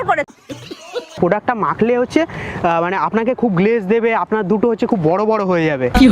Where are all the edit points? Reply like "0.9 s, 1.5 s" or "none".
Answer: 1.1 s